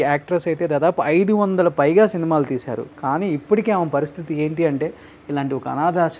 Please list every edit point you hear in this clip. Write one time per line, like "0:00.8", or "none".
none

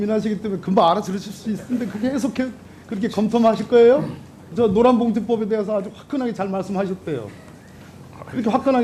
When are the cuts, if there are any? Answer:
0:04.5

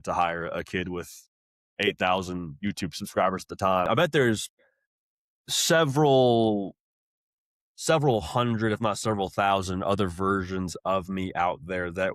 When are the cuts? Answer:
0:03.9

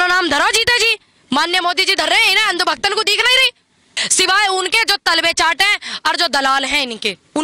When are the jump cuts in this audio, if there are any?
0:04.0

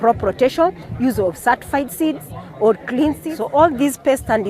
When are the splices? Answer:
0:03.3

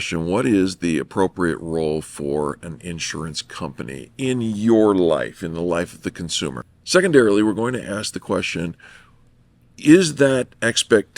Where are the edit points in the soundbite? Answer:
0:06.6

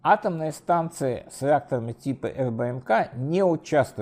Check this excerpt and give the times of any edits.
none

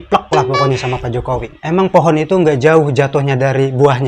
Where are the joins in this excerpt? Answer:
none

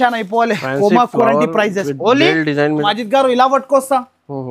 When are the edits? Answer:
0:02.8

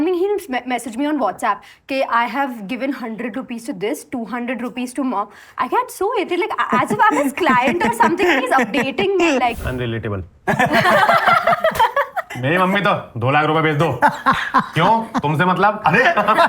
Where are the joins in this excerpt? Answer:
0:09.6
0:12.2

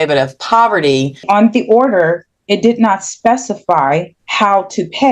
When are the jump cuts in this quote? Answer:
0:01.2
0:04.2

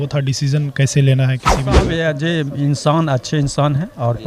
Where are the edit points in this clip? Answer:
0:01.9

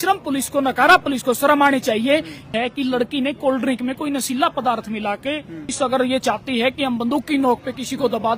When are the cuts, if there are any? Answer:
0:02.5
0:05.7

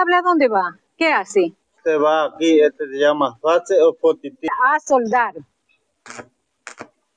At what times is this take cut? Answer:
0:04.5

